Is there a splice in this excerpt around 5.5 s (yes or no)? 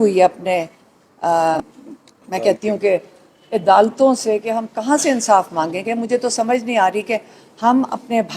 no